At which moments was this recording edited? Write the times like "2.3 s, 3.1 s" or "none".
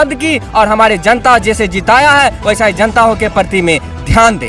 none